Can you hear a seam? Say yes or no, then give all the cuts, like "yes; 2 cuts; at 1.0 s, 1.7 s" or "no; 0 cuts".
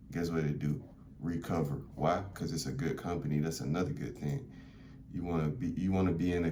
no; 0 cuts